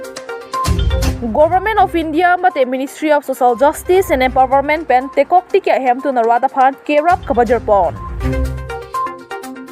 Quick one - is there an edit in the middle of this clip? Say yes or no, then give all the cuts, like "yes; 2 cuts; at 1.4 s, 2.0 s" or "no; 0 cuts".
yes; 2 cuts; at 1.1 s, 8.1 s